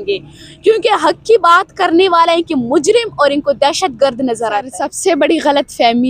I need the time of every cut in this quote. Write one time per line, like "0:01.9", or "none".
0:04.8